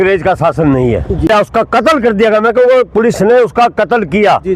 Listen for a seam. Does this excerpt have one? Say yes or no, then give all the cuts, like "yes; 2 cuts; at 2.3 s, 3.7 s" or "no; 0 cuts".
yes; 1 cut; at 1.3 s